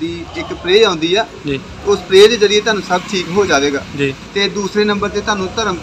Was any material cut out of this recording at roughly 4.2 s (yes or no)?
yes